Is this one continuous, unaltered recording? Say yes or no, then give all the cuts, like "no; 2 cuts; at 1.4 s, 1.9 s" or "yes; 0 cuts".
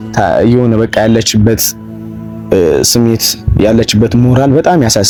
yes; 0 cuts